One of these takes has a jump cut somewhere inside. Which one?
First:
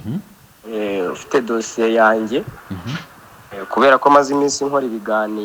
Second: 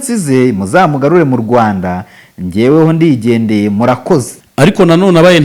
second; 1 cut; at 4.4 s

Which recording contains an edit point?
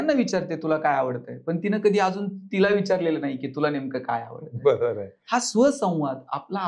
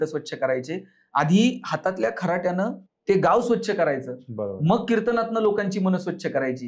second; 1 cut; at 2.9 s

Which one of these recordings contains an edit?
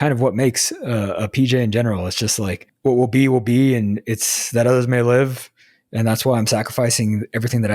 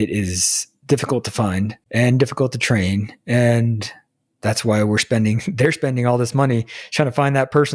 first; 1 cut; at 2.6 s

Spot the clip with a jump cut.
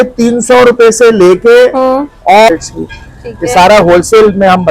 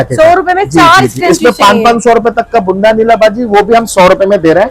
first; 1 cut; at 2.5 s

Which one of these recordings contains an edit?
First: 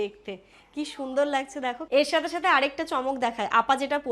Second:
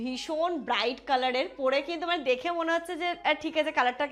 first; 1 cut; at 1.8 s

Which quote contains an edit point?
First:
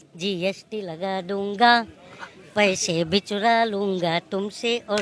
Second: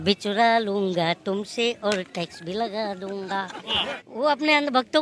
second; 1 cut; at 3.6 s

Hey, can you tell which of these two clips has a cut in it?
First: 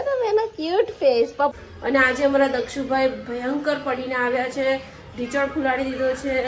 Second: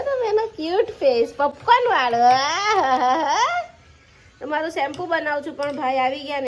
first; 1 cut; at 1.6 s

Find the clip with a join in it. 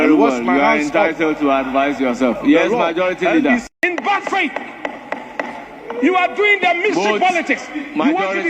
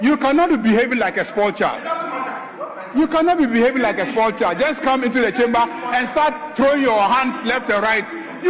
first; 1 cut; at 3.7 s

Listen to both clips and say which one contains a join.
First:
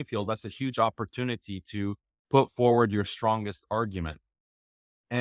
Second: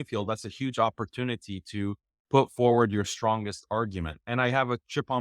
second; 1 cut; at 4.2 s

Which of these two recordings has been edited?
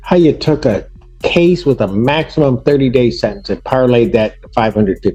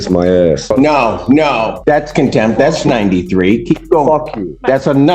second; 2 cuts; at 0.7 s, 1.7 s

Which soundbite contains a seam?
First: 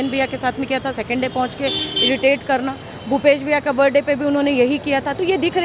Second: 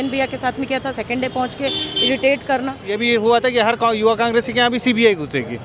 second; 1 cut; at 2.9 s

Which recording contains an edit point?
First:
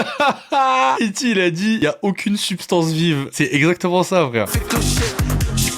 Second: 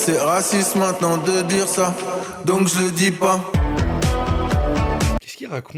first; 3 cuts; at 1.0 s, 3.3 s, 4.5 s

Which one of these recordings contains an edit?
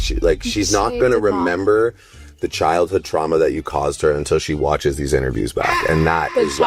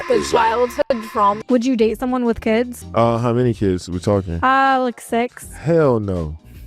second; 2 cuts; at 1.4 s, 2.8 s

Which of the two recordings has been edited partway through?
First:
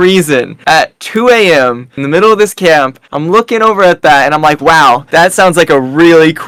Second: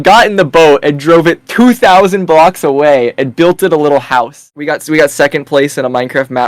second; 1 cut; at 4.6 s

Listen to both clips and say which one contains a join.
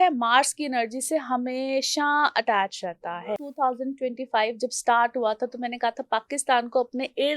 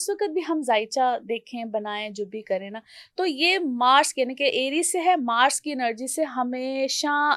first; 1 cut; at 3.2 s

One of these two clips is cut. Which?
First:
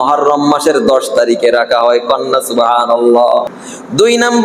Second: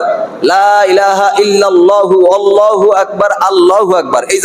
first; 1 cut; at 3.5 s

